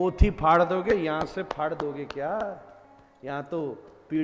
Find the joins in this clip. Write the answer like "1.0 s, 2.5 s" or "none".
none